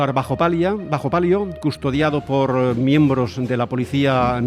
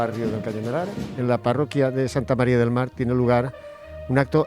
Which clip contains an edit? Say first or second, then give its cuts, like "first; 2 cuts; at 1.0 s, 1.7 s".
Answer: second; 1 cut; at 1.0 s